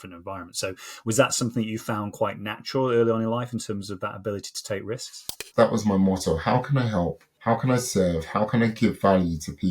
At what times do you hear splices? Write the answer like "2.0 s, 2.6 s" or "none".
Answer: 5.5 s, 7.3 s

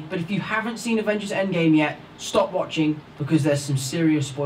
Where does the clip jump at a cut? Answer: none

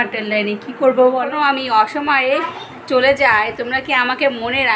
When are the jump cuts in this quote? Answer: 1.3 s

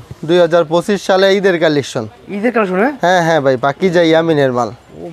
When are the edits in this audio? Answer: none

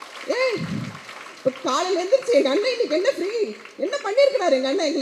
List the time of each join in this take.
none

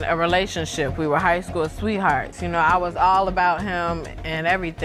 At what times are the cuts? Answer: none

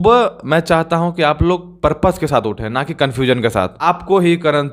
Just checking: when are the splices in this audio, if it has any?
3.7 s

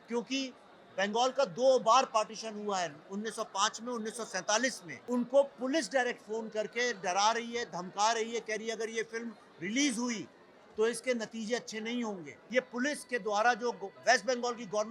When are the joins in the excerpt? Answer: 4.9 s, 12.3 s

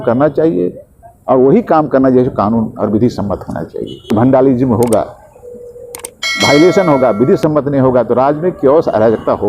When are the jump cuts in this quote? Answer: 4.1 s

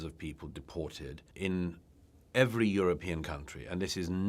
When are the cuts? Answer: 1.3 s

